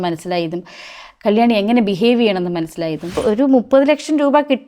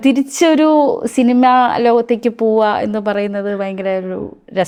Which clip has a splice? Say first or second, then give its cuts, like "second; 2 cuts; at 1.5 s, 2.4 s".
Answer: first; 1 cut; at 3.2 s